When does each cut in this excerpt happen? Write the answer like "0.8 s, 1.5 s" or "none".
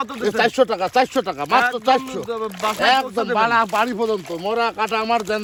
none